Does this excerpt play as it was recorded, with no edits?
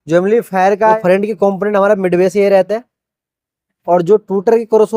no; 1 cut; at 1.0 s

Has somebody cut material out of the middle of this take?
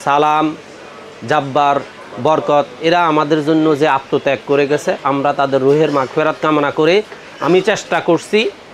no; 0 cuts

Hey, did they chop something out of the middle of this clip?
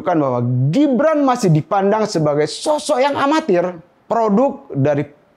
yes; 1 cut; at 3.9 s

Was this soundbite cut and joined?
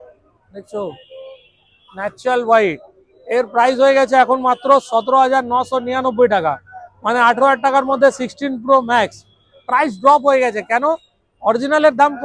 no; 0 cuts

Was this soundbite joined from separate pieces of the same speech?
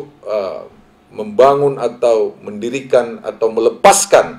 no; 0 cuts

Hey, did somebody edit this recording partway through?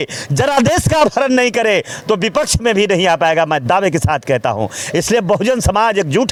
no; 0 cuts

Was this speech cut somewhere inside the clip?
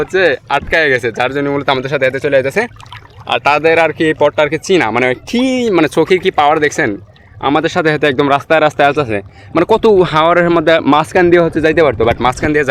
no; 0 cuts

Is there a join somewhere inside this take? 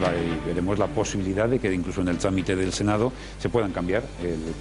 no; 0 cuts

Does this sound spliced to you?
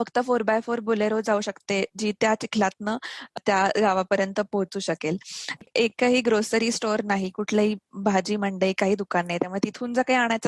yes; 1 cut; at 5.6 s

